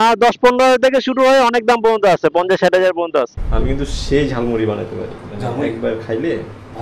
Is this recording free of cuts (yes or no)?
no